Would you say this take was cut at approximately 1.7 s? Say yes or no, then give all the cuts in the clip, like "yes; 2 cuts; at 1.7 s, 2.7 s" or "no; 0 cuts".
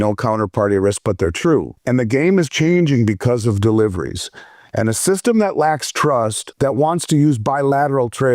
yes; 2 cuts; at 1.7 s, 6.4 s